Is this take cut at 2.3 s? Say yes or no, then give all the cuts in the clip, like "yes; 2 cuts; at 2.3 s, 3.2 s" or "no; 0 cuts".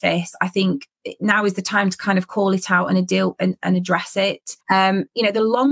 no; 1 cut; at 4.5 s